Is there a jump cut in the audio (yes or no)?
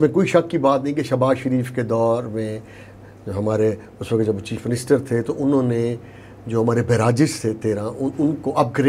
no